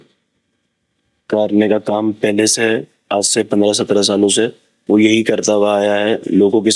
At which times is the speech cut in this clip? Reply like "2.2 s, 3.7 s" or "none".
none